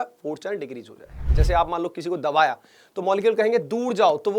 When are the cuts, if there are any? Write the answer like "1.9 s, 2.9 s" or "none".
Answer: 1.3 s